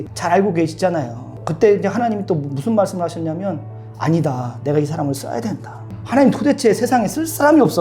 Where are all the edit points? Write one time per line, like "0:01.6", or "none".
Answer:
0:01.4